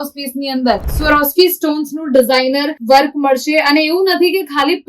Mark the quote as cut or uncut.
cut